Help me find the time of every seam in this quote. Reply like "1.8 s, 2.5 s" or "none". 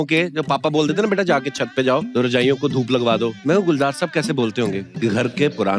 2.1 s, 3.4 s, 4.9 s

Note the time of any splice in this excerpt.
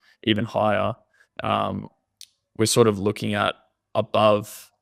none

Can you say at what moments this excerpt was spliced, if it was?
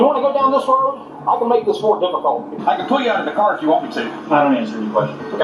2.6 s, 4.1 s

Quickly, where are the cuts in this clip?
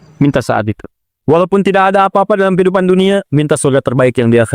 none

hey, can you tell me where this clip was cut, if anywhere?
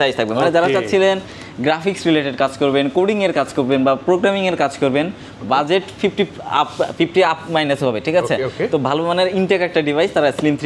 none

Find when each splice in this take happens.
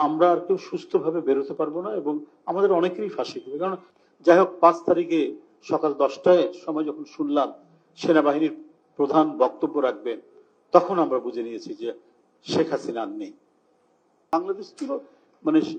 3.8 s, 14.3 s

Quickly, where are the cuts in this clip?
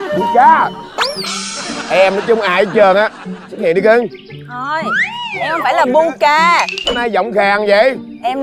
none

